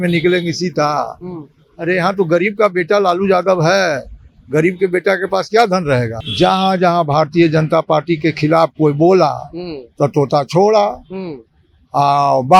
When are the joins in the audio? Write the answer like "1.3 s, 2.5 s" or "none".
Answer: 6.2 s